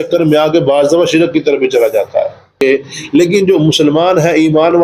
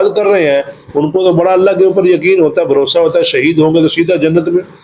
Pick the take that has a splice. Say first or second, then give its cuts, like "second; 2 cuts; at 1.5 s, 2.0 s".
first; 1 cut; at 2.6 s